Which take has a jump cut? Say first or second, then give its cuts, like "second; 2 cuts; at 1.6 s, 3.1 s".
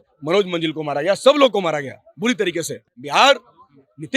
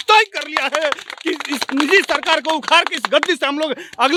first; 1 cut; at 2.8 s